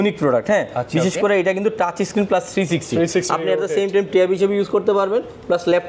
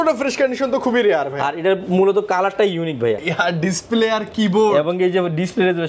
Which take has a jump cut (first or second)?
second